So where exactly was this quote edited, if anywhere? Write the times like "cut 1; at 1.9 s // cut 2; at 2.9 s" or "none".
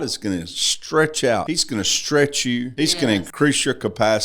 cut 1; at 1.5 s // cut 2; at 3.1 s